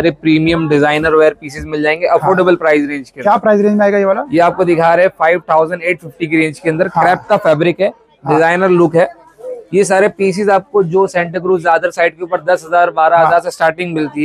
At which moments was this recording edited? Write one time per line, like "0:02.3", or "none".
none